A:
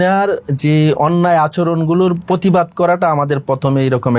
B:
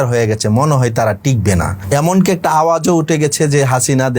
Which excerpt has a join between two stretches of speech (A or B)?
B